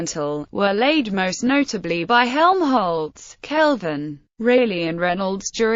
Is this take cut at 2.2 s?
no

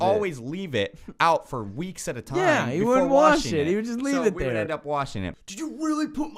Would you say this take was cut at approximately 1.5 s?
no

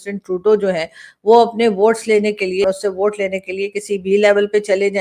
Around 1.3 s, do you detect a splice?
no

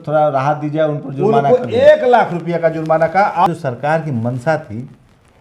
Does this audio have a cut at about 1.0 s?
no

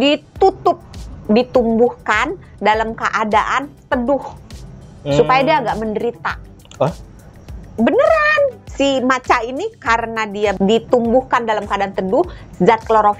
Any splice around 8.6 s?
yes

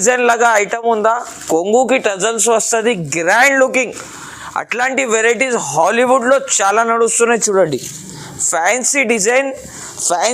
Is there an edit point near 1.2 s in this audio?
no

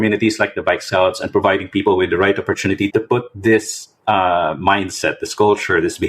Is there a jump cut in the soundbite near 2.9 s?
yes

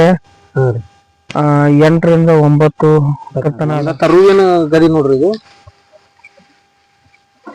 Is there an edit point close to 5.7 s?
no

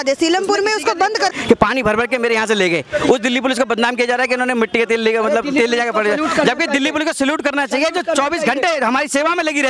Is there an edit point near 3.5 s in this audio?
no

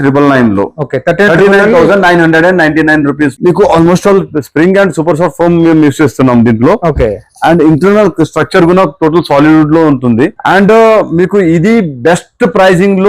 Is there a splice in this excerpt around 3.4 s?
yes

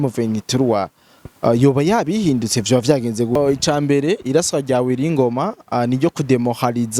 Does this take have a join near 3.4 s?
yes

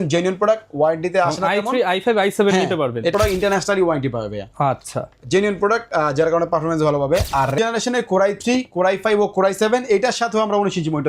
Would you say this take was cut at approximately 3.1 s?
yes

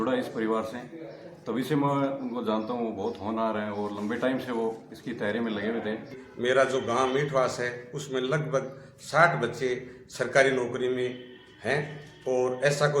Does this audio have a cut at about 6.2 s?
yes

